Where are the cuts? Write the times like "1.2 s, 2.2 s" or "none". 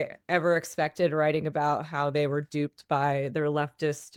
none